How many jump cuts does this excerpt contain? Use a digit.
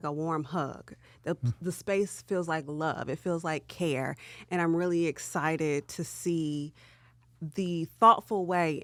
0